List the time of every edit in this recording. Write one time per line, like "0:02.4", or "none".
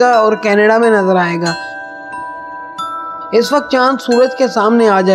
0:01.8
0:03.3

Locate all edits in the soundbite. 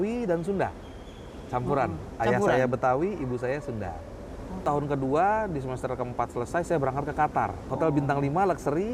0:04.6
0:07.7

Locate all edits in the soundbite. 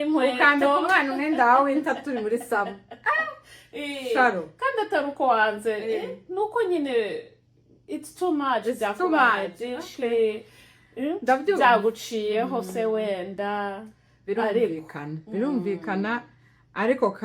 none

